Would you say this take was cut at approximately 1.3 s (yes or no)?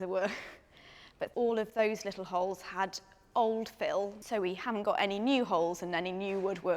yes